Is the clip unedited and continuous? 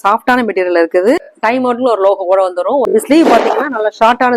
no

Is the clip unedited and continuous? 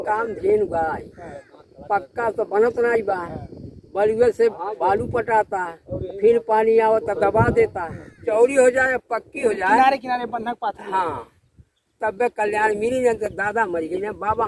no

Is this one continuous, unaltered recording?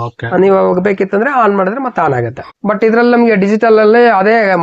no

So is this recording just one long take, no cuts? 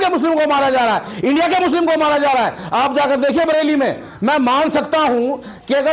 yes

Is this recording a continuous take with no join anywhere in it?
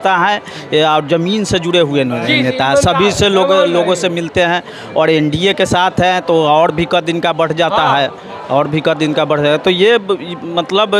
yes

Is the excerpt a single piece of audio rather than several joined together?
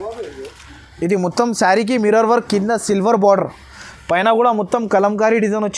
yes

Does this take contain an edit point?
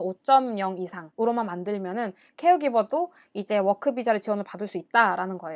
yes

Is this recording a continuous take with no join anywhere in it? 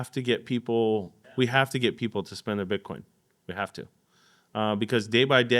no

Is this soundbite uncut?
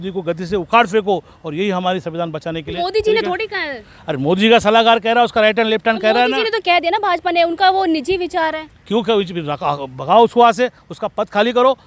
yes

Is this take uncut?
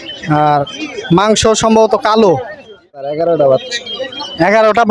no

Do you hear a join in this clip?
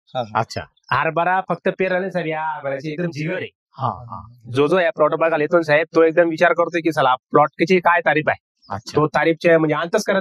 no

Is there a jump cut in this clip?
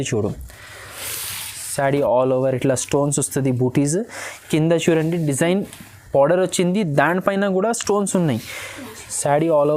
no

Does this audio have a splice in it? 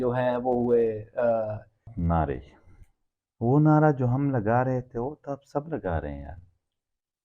yes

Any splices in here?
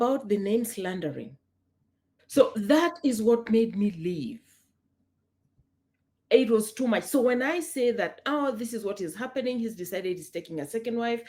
no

